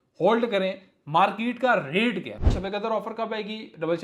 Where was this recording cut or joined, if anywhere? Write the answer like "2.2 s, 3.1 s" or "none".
2.6 s